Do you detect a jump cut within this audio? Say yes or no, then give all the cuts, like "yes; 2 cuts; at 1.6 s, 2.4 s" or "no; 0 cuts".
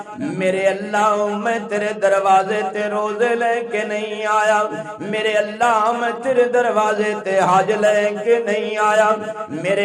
no; 0 cuts